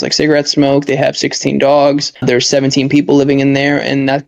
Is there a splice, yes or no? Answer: yes